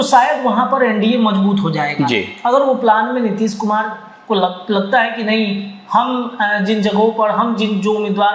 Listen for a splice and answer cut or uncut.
uncut